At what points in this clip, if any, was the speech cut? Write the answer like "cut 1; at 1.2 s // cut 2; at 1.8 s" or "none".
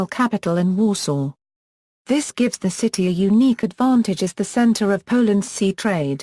cut 1; at 4.5 s